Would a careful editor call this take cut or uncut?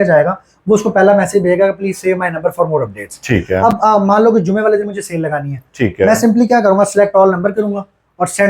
uncut